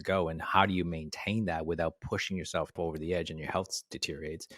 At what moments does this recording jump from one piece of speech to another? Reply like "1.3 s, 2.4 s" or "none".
2.8 s